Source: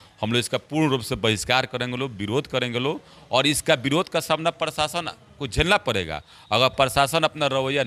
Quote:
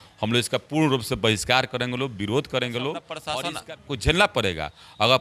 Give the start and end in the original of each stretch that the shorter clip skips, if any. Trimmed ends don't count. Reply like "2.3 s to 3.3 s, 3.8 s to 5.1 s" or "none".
3.2 s to 4.7 s